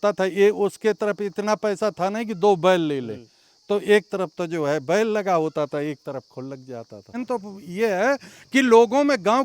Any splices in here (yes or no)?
yes